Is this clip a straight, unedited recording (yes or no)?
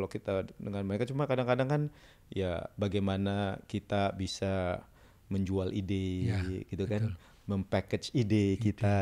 yes